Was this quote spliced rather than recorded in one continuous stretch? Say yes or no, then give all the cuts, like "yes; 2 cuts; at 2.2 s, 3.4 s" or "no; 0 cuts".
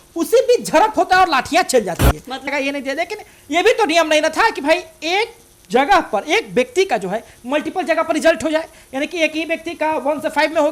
yes; 1 cut; at 2.5 s